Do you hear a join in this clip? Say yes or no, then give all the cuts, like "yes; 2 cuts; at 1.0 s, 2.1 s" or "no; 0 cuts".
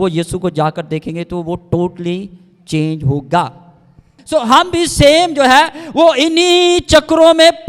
yes; 1 cut; at 4.0 s